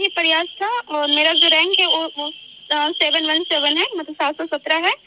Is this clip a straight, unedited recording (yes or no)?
yes